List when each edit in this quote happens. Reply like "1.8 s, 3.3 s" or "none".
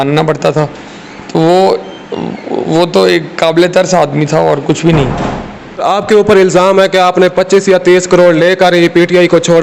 5.8 s